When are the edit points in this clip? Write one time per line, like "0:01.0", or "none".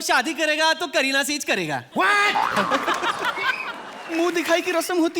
0:03.9